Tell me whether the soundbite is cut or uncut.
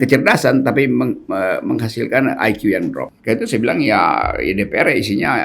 cut